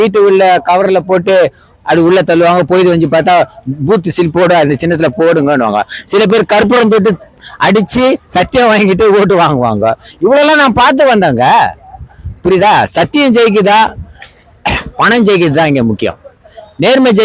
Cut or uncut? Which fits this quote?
uncut